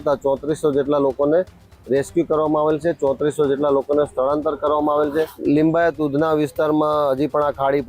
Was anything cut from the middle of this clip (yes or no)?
yes